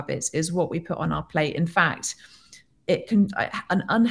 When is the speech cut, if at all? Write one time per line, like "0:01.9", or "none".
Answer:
none